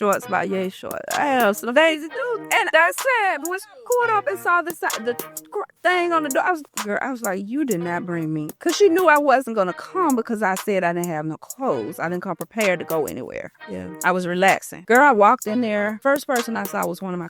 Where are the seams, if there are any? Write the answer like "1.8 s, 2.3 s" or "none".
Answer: 2.1 s, 14.7 s, 16.0 s